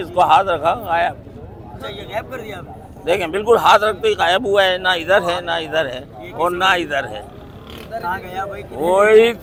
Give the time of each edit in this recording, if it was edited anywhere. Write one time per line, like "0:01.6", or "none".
none